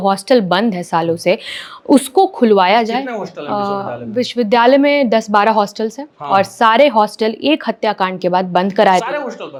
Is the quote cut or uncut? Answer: uncut